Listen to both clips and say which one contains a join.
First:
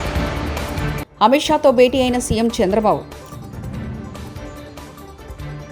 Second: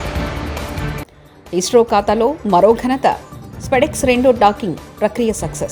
first; 1 cut; at 1.0 s

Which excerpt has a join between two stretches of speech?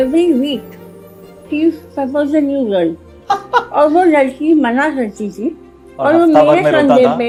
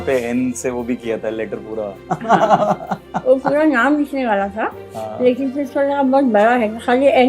second; 1 cut; at 3.0 s

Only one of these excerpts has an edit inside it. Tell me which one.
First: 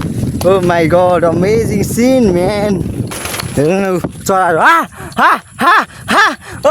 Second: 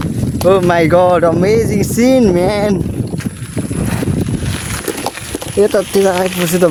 first; 1 cut; at 3.1 s

